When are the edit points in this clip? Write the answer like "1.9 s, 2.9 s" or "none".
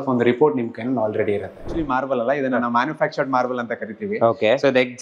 1.7 s